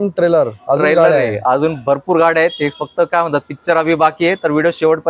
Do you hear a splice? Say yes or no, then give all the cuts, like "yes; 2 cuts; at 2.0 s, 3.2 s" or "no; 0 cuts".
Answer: no; 0 cuts